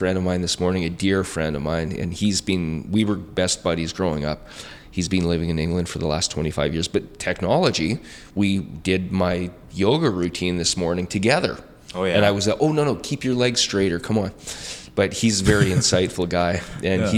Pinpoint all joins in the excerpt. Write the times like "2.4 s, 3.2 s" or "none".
none